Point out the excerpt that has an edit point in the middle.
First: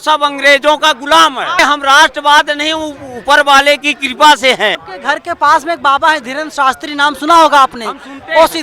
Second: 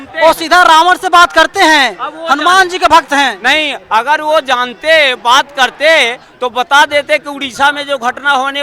first; 2 cuts; at 1.6 s, 4.8 s

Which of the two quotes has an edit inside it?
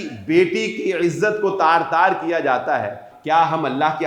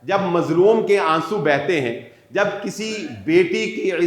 first; 1 cut; at 3.1 s

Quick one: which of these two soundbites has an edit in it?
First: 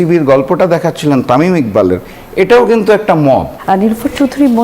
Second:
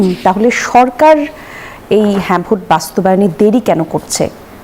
first; 1 cut; at 3.5 s

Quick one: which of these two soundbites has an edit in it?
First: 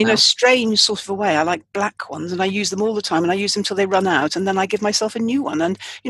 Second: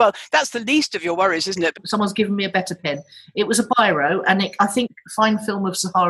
second; 2 cuts; at 1.8 s, 4.9 s

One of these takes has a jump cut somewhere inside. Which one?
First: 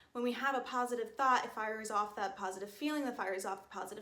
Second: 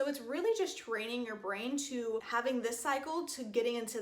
second; 1 cut; at 2.3 s

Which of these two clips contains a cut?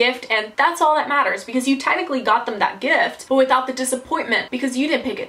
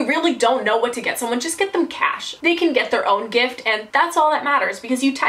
second; 1 cut; at 2.4 s

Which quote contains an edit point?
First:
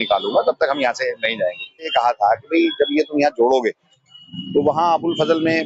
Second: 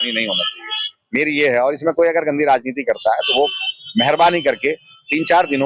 first; 1 cut; at 1.9 s

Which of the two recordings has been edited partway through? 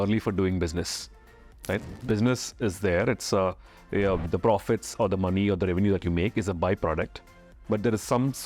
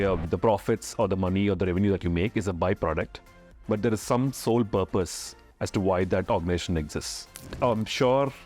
second; 1 cut; at 7.5 s

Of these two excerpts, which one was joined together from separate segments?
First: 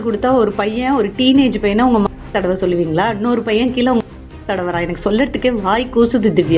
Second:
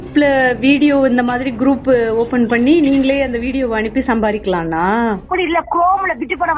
second; 1 cut; at 5.3 s

